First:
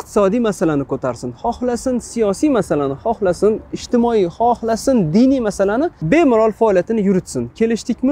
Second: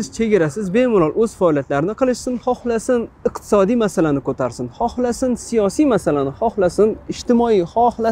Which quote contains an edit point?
first; 1 cut; at 6.0 s

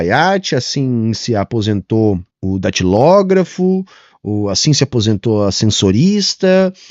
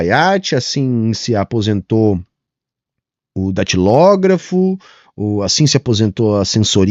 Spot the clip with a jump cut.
first; 1 cut; at 2.3 s

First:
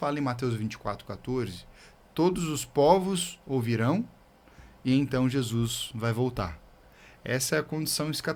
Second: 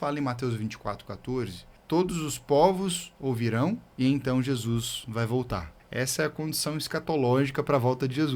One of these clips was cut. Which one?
second; 3 cuts; at 1.7 s, 3.9 s, 5.8 s

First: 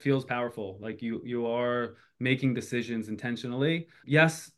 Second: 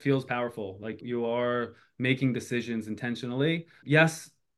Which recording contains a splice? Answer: second; 1 cut; at 1.0 s

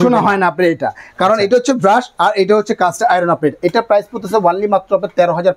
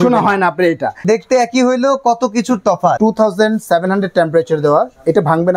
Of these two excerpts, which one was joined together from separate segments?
second; 2 cuts; at 1.0 s, 3.0 s

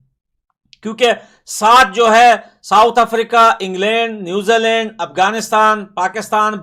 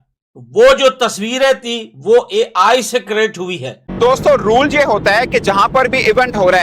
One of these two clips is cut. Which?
second; 1 cut; at 4.0 s

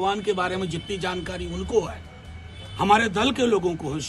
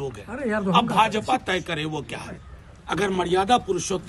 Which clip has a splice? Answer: second; 1 cut; at 2.4 s

